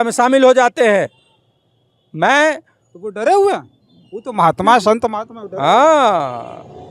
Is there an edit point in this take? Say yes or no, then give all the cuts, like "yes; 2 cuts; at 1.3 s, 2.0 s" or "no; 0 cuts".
no; 0 cuts